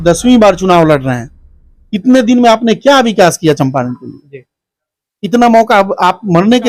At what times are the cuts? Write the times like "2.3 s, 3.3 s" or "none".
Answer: none